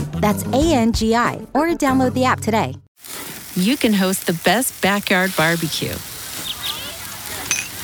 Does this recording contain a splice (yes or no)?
yes